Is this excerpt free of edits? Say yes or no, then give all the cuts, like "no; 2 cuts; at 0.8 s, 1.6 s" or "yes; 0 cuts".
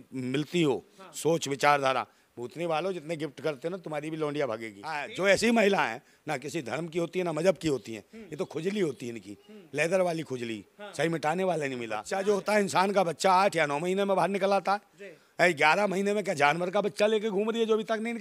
no; 2 cuts; at 5.1 s, 12.0 s